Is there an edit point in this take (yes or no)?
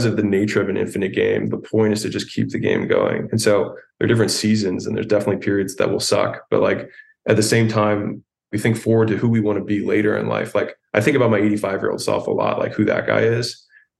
no